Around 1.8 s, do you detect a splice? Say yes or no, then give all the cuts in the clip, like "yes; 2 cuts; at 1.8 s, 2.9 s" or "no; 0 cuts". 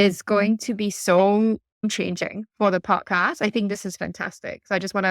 yes; 1 cut; at 1.8 s